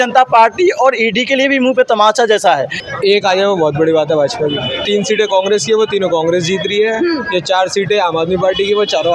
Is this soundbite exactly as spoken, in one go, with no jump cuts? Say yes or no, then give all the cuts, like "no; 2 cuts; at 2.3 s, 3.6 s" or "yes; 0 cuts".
no; 2 cuts; at 2.8 s, 4.8 s